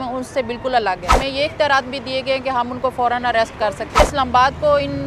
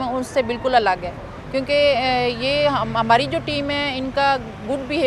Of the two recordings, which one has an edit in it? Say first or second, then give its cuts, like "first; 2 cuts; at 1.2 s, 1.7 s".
first; 2 cuts; at 1.2 s, 4.0 s